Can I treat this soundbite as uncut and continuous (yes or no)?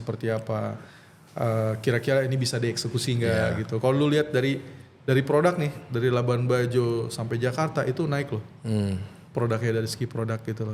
yes